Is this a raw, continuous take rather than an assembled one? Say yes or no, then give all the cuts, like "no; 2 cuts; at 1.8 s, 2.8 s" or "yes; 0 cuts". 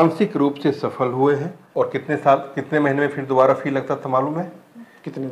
no; 1 cut; at 1.6 s